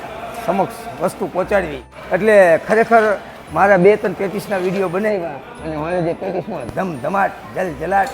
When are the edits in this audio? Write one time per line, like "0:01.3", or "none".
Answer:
0:01.9